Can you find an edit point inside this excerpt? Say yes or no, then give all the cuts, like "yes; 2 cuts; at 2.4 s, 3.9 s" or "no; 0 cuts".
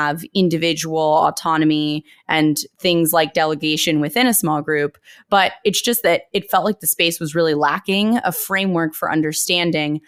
no; 0 cuts